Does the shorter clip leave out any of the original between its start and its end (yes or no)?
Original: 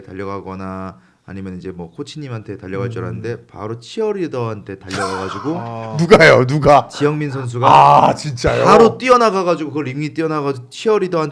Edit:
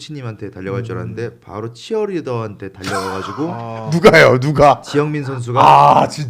no